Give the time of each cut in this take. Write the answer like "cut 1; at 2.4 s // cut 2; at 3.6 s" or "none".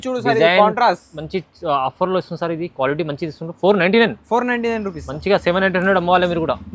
none